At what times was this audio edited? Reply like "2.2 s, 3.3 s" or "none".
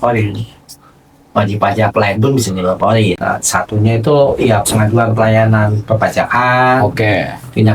3.2 s